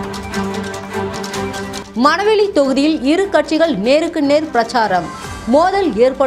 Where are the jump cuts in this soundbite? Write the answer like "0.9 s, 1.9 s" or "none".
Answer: 1.8 s

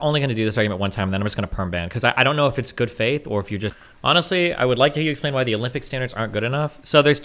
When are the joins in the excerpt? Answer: 3.9 s

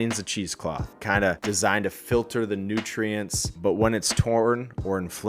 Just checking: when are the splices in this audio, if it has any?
1.4 s

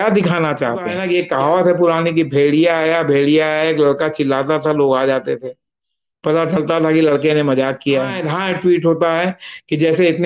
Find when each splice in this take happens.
0.9 s, 8.2 s

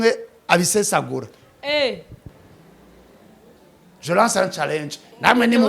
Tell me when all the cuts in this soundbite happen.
2.2 s

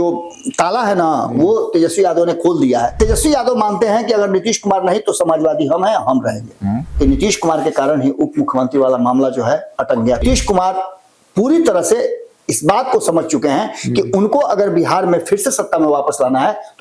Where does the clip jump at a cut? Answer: 2.9 s, 6.9 s, 10.2 s

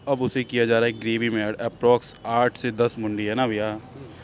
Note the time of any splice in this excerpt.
none

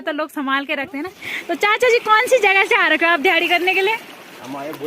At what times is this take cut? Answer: 1.3 s

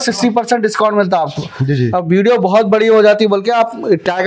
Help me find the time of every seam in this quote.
none

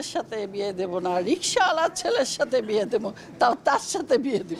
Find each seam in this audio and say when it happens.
none

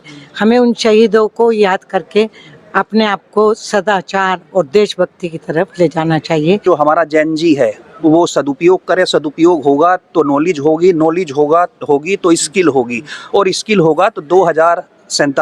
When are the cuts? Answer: 6.6 s

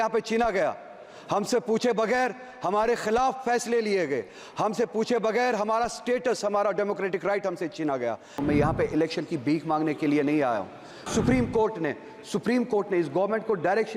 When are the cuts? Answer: 8.3 s, 11.1 s

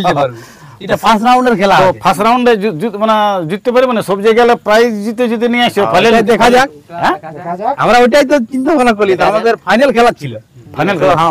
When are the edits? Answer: none

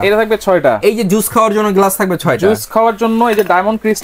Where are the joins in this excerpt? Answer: none

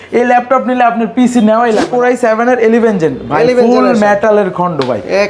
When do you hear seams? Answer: 1.9 s

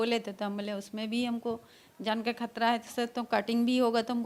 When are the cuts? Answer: none

